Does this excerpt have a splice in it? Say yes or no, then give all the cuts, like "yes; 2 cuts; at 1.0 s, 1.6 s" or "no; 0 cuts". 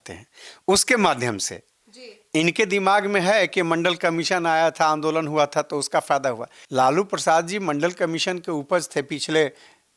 yes; 1 cut; at 6.5 s